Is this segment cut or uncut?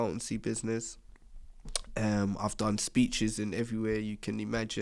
uncut